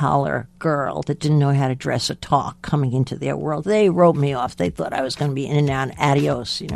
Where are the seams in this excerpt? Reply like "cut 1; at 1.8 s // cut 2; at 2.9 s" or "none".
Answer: none

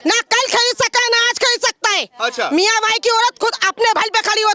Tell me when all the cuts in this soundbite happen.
none

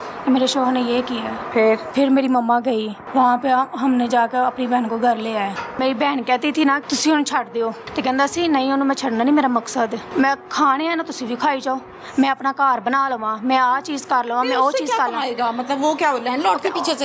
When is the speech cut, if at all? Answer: cut 1; at 1.9 s // cut 2; at 3.0 s // cut 3; at 5.8 s // cut 4; at 6.8 s // cut 5; at 7.8 s // cut 6; at 10.1 s

